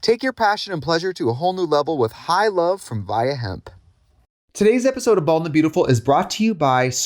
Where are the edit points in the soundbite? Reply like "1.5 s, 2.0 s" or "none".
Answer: 4.3 s